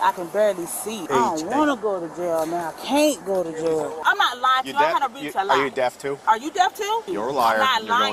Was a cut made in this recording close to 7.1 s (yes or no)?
yes